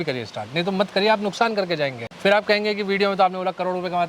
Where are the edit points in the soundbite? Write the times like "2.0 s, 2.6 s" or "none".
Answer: 2.0 s